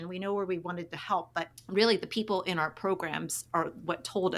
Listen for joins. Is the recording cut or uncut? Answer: cut